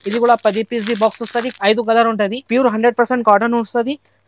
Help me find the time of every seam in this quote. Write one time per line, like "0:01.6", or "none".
0:02.5